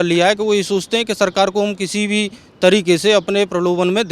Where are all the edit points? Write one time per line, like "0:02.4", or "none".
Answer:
none